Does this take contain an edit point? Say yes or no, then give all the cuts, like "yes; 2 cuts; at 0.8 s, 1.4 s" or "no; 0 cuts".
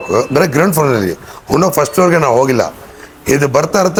no; 0 cuts